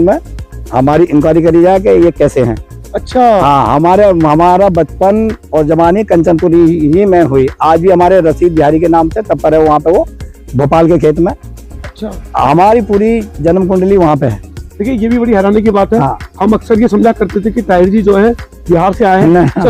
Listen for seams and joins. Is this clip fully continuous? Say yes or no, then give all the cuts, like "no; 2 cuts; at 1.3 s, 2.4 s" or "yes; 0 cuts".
yes; 0 cuts